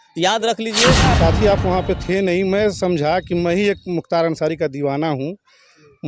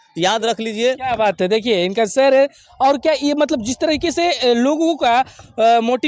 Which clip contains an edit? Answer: first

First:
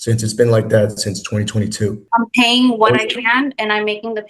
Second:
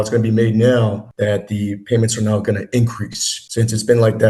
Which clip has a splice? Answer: first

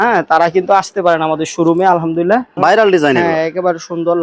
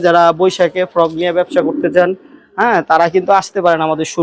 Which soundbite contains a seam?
first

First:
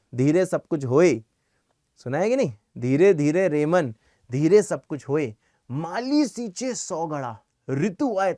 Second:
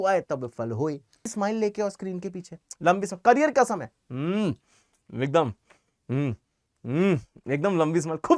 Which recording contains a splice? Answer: second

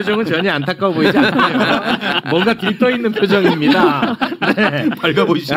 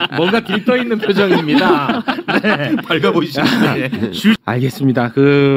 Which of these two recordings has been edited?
second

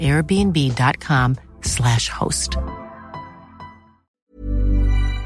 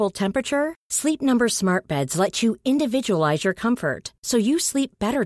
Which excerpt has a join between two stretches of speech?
first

